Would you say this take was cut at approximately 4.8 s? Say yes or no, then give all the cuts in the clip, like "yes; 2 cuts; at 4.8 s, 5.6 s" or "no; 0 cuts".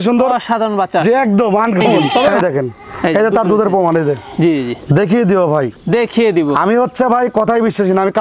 no; 1 cut; at 2.3 s